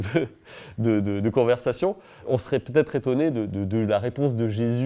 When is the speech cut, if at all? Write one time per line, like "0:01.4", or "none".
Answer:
0:02.1